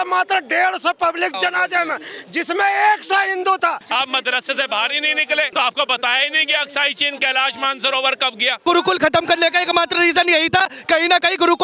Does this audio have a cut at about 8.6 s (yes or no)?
yes